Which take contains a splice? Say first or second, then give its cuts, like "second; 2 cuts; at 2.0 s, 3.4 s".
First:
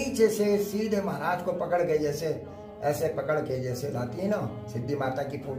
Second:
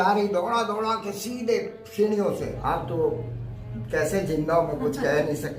second; 1 cut; at 2.5 s